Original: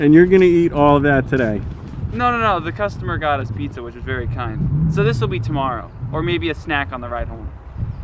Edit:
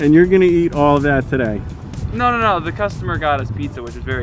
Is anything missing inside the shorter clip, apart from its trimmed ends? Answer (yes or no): no